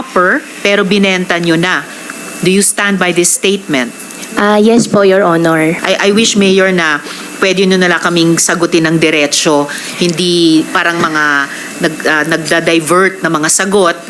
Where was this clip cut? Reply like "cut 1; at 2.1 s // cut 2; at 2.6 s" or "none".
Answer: cut 1; at 5.8 s